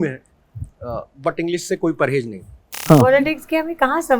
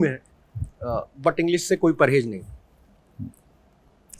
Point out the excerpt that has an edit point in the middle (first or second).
first